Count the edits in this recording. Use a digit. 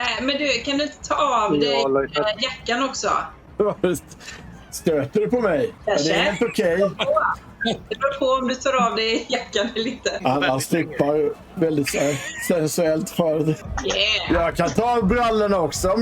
4